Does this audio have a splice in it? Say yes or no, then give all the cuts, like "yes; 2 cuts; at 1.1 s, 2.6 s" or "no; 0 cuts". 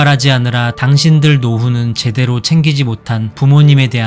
no; 0 cuts